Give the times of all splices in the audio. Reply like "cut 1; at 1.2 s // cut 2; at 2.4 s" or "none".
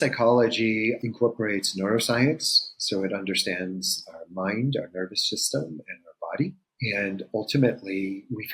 cut 1; at 1.0 s // cut 2; at 6.7 s